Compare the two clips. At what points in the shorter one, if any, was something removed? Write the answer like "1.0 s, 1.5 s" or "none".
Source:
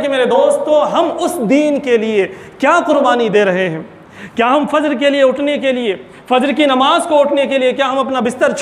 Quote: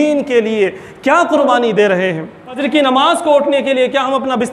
2.6 s